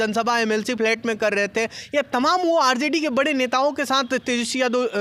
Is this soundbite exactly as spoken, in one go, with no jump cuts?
yes; 0 cuts

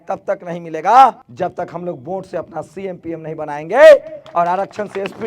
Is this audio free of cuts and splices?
no; 1 cut; at 1.3 s

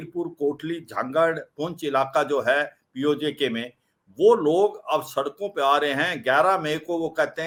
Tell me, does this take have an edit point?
no; 0 cuts

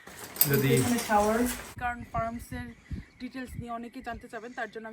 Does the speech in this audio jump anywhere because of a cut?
yes; 1 cut; at 1.7 s

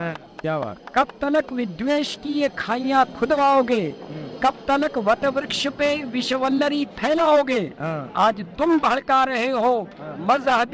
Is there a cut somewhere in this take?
no; 0 cuts

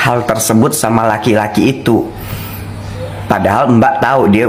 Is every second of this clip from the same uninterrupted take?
yes; 0 cuts

